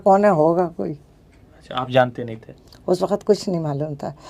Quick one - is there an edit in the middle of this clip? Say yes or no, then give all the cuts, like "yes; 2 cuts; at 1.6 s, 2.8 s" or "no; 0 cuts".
no; 0 cuts